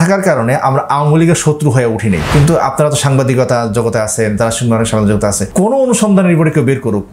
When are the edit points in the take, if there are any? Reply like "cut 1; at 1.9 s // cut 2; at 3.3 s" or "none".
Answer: cut 1; at 2.2 s // cut 2; at 5.4 s